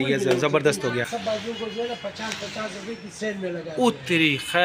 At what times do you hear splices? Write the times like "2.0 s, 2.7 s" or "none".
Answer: 1.1 s